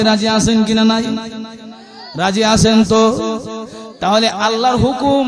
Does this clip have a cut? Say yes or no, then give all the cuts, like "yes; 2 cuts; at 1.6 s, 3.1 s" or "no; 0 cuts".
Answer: no; 0 cuts